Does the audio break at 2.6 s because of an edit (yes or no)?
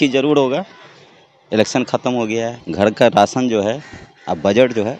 yes